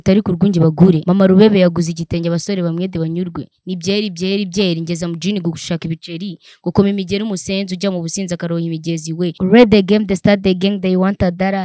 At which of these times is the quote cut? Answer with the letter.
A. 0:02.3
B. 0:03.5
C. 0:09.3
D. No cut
C